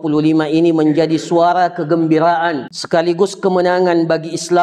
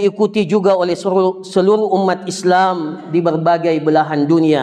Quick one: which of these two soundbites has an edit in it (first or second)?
first